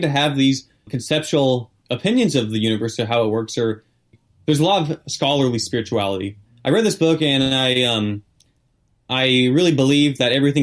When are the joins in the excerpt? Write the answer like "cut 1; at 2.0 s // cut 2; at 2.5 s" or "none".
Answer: cut 1; at 0.9 s // cut 2; at 1.7 s // cut 3; at 4.1 s // cut 4; at 6.4 s